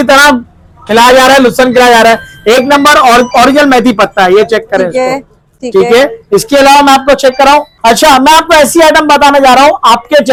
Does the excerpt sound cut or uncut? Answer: uncut